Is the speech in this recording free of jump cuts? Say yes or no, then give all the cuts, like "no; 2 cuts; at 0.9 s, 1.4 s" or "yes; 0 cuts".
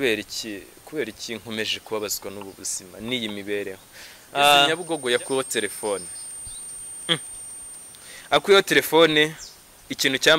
no; 1 cut; at 4.8 s